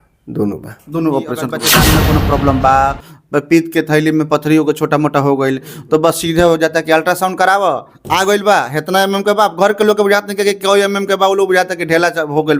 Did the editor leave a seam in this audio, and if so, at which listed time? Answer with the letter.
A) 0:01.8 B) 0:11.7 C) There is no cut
A